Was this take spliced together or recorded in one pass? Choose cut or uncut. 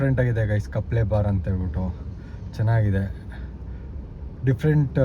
uncut